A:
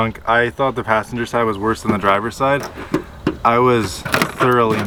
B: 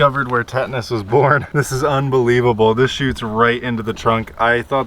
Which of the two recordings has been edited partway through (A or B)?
B